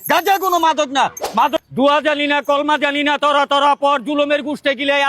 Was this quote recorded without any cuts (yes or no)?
no